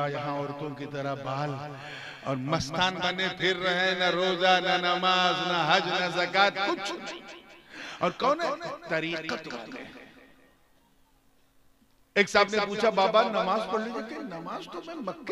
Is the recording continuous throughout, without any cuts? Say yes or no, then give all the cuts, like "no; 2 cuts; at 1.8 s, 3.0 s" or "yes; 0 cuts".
yes; 0 cuts